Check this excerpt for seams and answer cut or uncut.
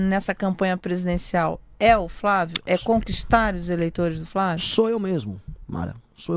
uncut